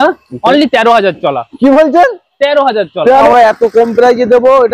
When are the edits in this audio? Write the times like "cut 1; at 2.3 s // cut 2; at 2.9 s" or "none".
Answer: cut 1; at 3.3 s